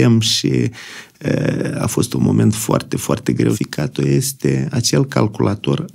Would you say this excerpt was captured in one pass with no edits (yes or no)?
no